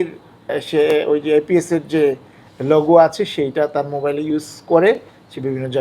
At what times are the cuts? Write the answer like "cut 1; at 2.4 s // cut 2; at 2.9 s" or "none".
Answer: none